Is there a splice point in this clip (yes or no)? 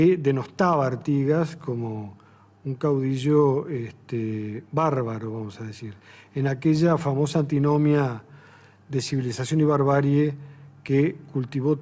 no